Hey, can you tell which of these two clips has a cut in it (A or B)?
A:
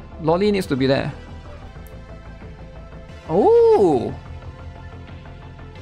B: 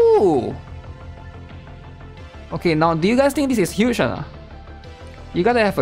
A